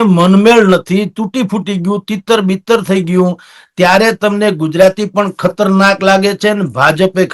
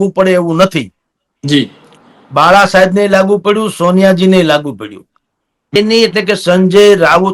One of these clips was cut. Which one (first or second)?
second